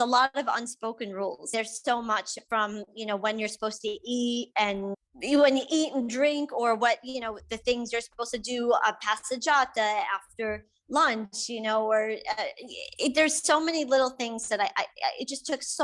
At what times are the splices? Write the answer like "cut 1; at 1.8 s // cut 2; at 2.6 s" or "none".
cut 1; at 1.5 s // cut 2; at 5.0 s

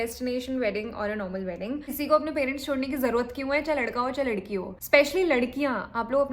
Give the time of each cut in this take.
cut 1; at 1.9 s

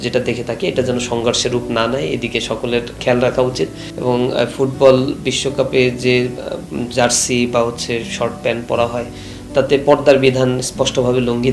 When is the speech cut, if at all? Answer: cut 1; at 3.8 s

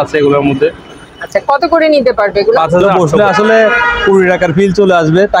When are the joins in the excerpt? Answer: cut 1; at 2.9 s

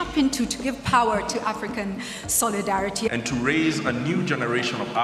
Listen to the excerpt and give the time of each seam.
cut 1; at 3.1 s

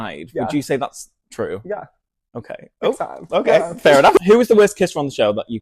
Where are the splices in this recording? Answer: cut 1; at 4.2 s

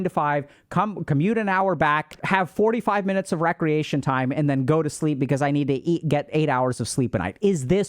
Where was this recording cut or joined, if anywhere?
cut 1; at 2.2 s

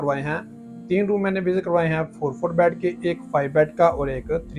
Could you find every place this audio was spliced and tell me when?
none

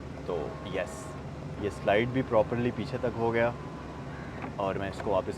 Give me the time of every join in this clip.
none

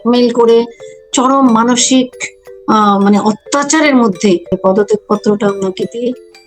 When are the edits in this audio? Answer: cut 1; at 4.5 s

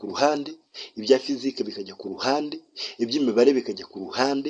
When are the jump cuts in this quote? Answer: none

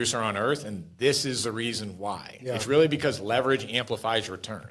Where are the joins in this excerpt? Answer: none

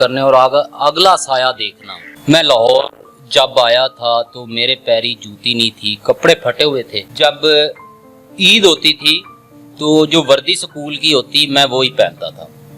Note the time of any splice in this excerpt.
cut 1; at 2.1 s // cut 2; at 7.0 s

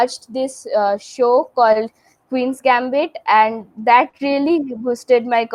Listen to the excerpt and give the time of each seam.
none

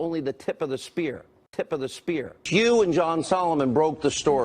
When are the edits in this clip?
cut 1; at 1.3 s

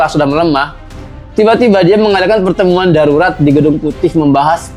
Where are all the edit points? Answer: none

